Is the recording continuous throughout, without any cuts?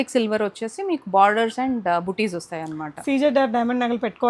yes; 0 cuts

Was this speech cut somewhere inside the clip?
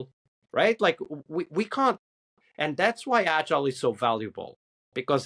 no; 0 cuts

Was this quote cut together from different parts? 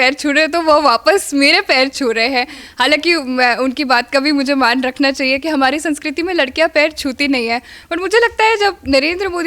no; 0 cuts

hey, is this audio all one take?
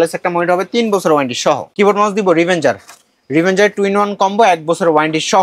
yes; 0 cuts

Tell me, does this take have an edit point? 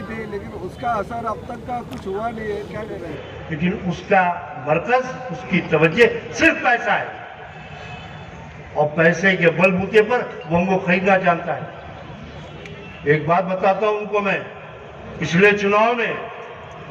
yes; 1 cut; at 3.2 s

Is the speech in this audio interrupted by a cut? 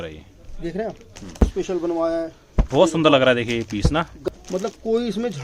yes; 2 cuts; at 1.4 s, 4.1 s

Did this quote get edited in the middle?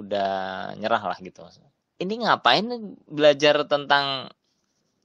yes; 1 cut; at 1.9 s

